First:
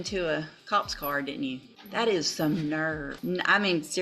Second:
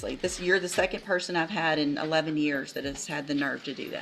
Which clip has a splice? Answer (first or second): first